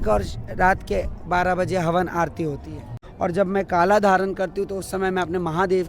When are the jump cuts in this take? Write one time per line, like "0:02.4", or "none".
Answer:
0:03.0